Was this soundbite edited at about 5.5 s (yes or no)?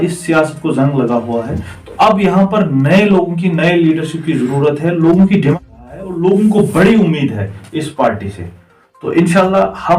yes